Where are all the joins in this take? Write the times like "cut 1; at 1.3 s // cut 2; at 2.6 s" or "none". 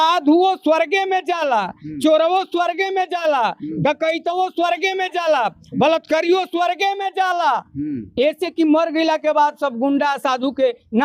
none

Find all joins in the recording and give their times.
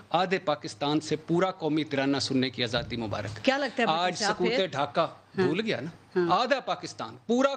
none

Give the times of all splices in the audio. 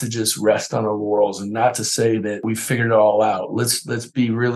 cut 1; at 2.4 s

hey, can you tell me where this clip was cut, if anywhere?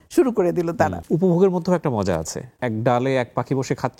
cut 1; at 1.0 s // cut 2; at 2.5 s

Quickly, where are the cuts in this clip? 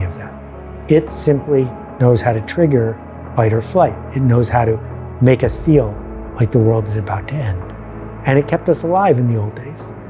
none

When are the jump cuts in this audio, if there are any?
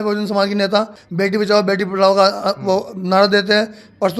cut 1; at 1.0 s

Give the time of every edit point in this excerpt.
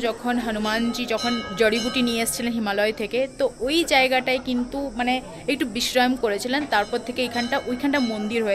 none

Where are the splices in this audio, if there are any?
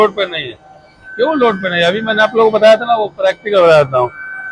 none

